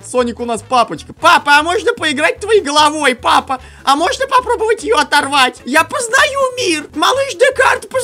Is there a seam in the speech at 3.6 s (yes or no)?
no